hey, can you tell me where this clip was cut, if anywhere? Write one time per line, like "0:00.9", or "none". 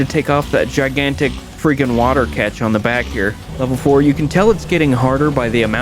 0:03.4